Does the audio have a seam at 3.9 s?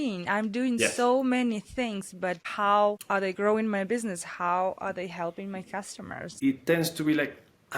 no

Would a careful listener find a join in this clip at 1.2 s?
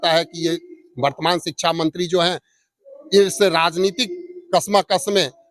no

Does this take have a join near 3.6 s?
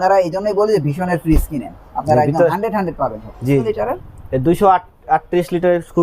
yes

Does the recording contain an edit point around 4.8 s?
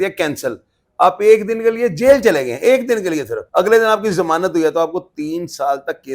no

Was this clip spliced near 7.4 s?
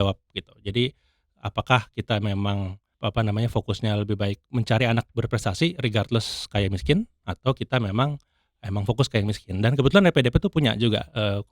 no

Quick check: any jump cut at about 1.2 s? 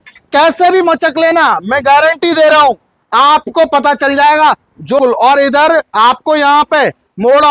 no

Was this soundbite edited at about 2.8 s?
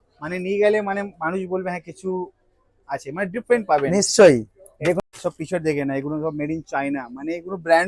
no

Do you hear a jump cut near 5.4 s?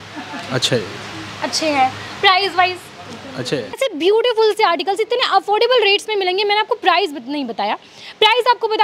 no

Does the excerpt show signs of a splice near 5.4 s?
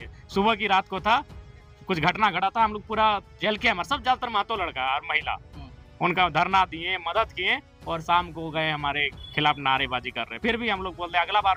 no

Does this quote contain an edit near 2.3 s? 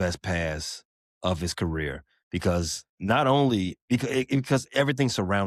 no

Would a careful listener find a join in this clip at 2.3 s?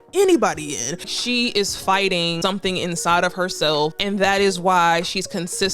yes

